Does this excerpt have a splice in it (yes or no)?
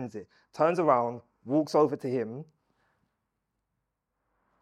no